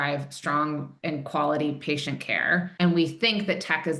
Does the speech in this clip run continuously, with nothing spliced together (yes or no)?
yes